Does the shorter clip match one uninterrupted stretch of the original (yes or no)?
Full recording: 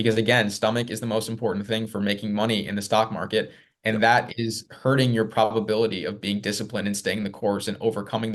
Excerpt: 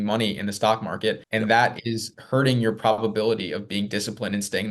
no